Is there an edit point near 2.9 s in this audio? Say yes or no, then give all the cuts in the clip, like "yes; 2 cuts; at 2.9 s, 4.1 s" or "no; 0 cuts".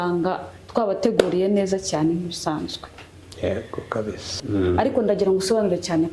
no; 1 cut; at 4.3 s